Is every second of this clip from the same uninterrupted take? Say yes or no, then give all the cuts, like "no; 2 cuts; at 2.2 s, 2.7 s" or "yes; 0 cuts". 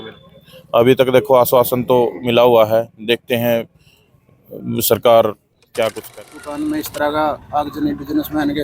no; 1 cut; at 6.1 s